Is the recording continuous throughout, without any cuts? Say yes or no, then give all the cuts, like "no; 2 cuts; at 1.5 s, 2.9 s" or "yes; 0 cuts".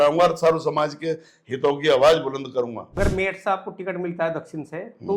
no; 1 cut; at 2.9 s